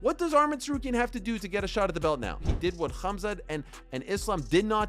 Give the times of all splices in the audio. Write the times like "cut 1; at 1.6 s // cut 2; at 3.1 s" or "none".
cut 1; at 2.4 s